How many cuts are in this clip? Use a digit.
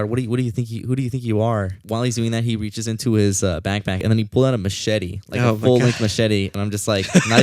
3